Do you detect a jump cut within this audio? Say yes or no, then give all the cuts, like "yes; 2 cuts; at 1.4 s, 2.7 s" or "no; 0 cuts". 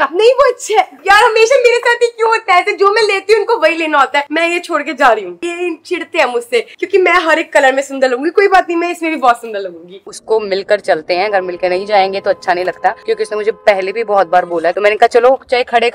yes; 4 cuts; at 0.9 s, 5.4 s, 10.1 s, 14.7 s